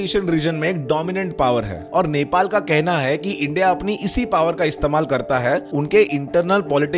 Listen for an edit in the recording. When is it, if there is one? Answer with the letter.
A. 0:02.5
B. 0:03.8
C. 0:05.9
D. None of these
D